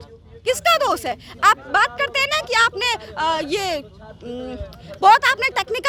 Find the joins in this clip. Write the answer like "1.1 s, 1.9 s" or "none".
none